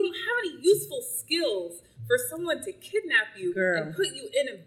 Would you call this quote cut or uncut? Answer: uncut